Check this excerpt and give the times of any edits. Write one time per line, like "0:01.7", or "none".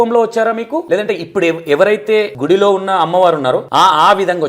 0:00.8
0:02.4
0:03.6